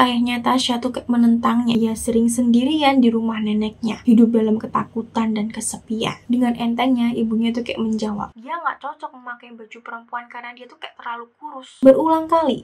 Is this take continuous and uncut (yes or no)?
no